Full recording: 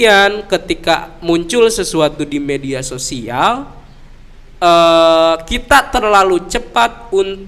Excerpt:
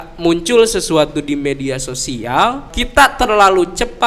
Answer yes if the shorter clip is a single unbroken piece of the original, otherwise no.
no